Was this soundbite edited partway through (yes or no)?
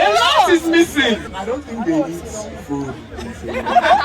yes